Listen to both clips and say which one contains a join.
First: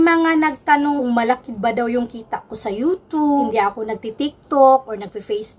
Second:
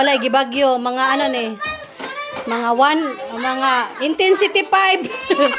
first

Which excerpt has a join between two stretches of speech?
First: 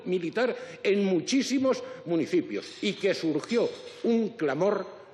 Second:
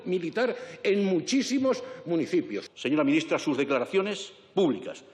second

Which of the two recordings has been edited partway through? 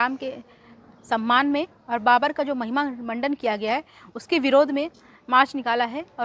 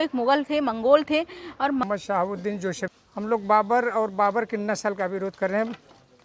second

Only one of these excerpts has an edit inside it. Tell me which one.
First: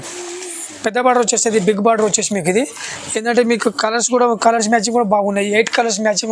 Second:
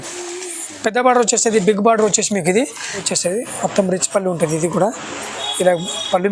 second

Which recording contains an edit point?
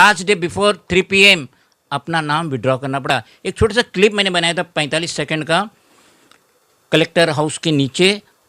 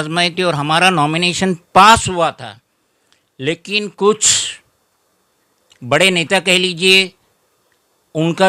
first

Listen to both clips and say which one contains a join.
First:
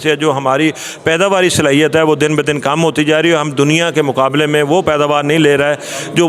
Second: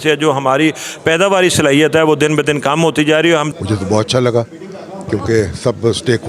second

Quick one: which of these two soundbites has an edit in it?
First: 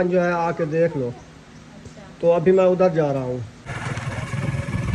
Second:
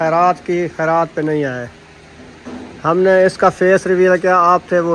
first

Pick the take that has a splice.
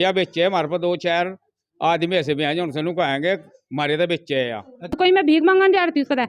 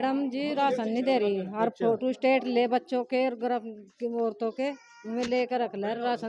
first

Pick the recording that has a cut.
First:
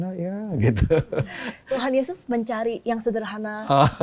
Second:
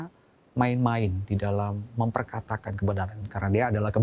first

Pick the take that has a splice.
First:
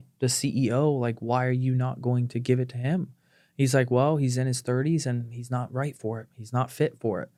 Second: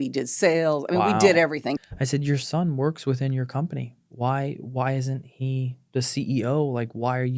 second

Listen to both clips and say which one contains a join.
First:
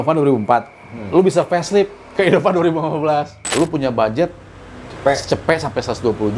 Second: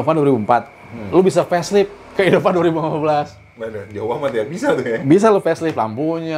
first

